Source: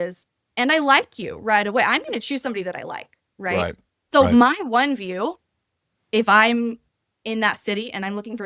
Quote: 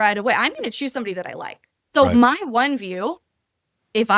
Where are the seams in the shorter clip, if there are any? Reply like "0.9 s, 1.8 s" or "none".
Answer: 1.7 s